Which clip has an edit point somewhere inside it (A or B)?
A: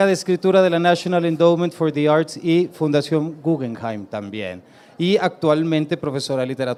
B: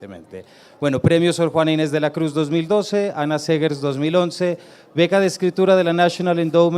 B